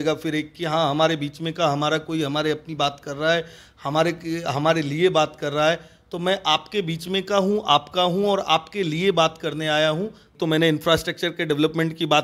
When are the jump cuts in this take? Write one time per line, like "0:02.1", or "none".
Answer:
0:10.2